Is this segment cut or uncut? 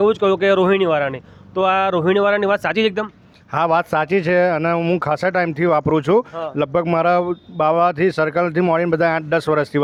uncut